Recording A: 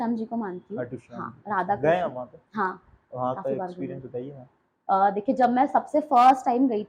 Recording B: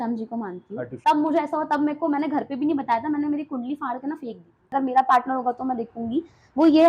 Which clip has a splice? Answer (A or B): B